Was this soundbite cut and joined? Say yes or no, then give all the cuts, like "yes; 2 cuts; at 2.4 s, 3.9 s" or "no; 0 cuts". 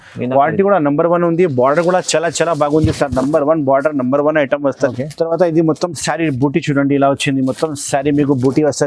yes; 1 cut; at 4.9 s